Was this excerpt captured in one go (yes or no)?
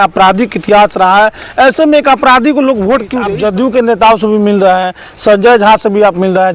no